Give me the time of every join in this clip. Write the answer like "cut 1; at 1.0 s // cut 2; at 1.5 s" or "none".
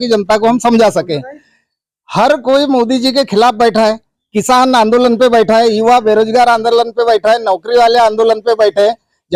none

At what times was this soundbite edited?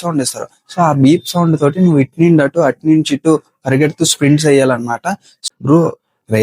cut 1; at 5.3 s

